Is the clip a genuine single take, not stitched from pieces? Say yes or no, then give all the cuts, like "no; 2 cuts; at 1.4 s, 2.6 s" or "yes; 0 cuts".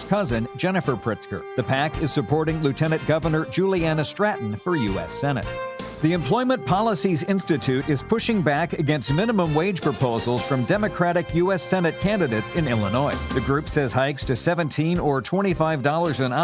yes; 0 cuts